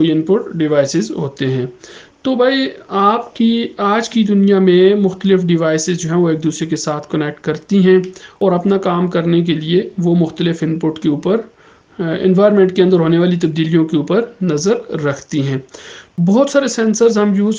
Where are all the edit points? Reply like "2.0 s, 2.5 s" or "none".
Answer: 16.1 s